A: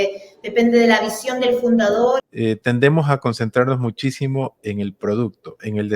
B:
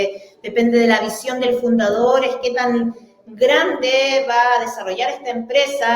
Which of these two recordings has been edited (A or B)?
A